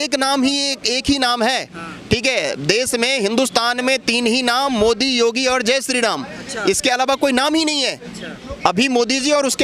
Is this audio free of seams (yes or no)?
yes